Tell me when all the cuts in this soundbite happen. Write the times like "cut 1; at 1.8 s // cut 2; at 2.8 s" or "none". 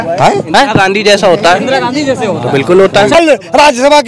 cut 1; at 3.2 s